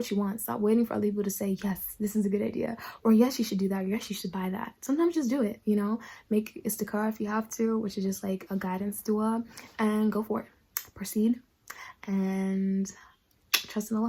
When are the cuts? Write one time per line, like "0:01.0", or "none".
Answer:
none